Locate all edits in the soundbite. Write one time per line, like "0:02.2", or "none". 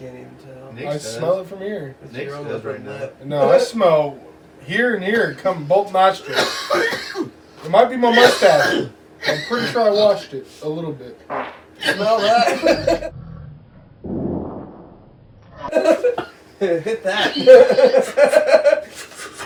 none